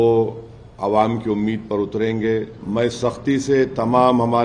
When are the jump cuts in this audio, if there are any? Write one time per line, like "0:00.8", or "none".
0:02.6